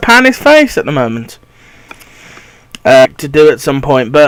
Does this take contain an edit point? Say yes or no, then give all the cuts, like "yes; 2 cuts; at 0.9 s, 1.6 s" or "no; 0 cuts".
no; 0 cuts